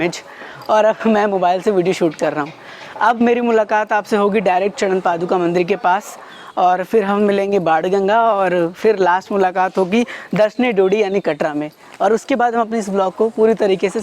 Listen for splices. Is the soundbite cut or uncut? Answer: uncut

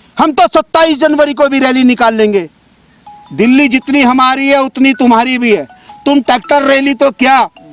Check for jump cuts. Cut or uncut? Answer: uncut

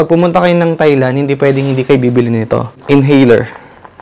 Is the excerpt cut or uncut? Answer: cut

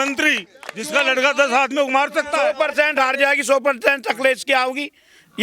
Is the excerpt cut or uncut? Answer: cut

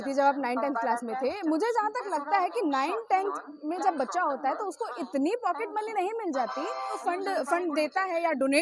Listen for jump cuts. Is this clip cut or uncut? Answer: cut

